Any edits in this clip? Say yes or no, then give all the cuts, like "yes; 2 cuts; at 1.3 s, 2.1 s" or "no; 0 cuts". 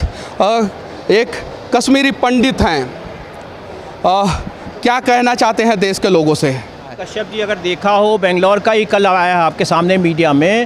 yes; 1 cut; at 7.1 s